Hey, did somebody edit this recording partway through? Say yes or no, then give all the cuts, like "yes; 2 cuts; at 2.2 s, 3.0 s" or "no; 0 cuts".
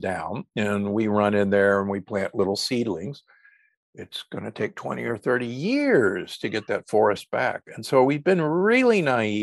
no; 0 cuts